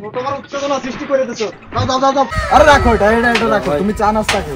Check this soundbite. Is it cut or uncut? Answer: cut